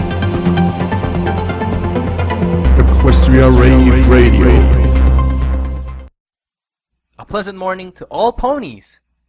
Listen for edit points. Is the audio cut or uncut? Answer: cut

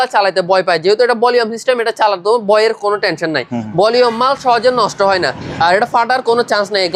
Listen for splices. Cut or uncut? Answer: uncut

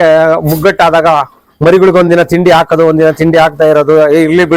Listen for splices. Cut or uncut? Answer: uncut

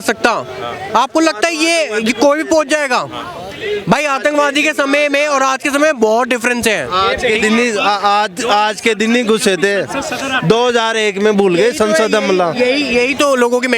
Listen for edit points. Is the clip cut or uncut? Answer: uncut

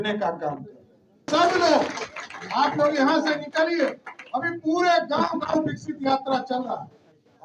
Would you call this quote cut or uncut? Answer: uncut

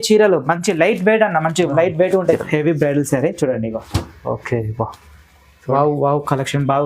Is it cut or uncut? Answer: cut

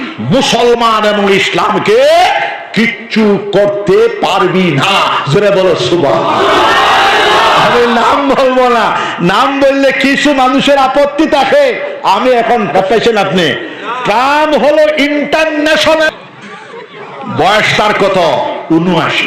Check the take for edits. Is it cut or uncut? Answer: cut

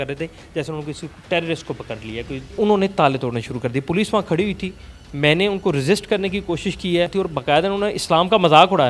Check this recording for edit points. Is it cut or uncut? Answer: cut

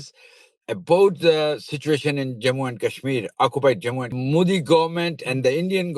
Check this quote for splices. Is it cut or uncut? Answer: cut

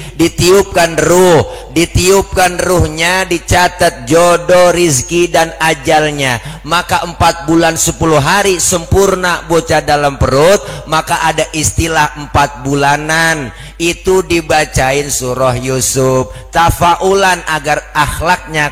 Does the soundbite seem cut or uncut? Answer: uncut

